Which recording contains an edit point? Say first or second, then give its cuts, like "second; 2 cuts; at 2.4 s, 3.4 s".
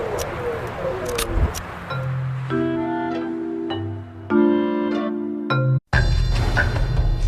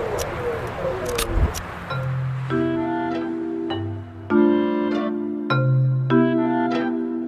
second; 1 cut; at 5.8 s